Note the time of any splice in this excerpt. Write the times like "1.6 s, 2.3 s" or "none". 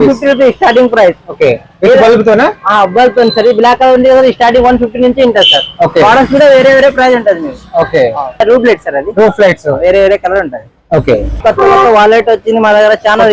none